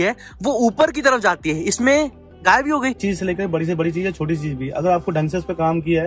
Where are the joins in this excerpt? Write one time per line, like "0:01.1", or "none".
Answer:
0:03.0